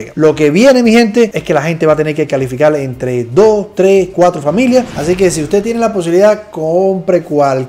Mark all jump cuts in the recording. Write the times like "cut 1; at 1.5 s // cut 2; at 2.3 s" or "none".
cut 1; at 4.9 s